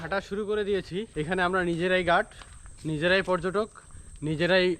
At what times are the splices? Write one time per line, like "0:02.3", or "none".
0:01.1